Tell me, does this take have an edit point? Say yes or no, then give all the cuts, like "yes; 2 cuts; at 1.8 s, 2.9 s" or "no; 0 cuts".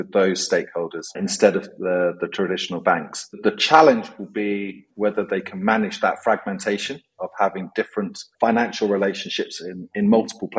yes; 2 cuts; at 1.0 s, 3.3 s